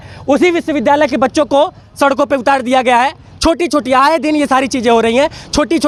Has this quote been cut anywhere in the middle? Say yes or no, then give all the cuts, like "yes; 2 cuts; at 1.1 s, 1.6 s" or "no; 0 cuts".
no; 0 cuts